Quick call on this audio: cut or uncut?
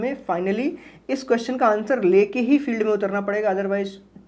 uncut